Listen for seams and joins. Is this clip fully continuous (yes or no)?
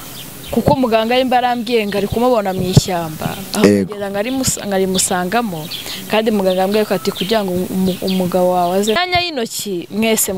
no